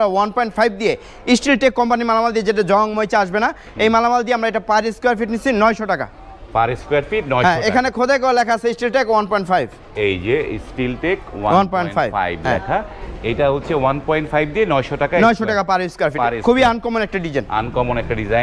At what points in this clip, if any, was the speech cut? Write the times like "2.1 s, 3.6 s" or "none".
none